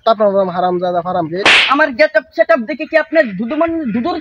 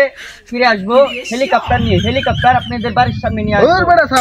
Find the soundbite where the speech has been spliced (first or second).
first